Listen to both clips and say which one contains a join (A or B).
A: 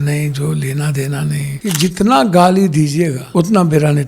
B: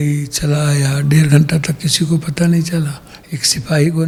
A